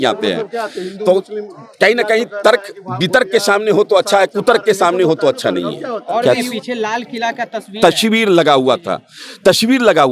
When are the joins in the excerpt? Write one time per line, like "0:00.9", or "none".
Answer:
0:06.2